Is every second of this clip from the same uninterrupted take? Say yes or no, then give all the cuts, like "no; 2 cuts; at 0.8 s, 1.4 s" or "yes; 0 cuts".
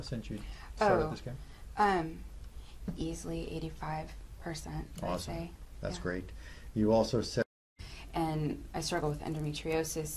no; 1 cut; at 7.4 s